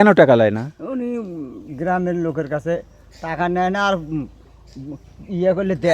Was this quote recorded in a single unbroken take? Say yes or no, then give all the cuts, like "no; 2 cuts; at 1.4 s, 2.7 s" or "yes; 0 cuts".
yes; 0 cuts